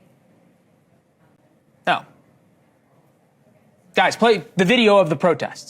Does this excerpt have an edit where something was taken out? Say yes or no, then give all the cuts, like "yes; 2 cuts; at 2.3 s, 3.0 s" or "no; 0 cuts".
no; 0 cuts